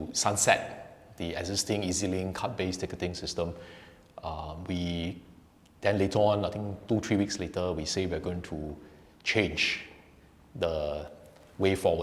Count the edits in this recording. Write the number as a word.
zero